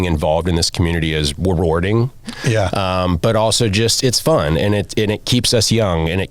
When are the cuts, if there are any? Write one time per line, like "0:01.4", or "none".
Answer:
0:02.3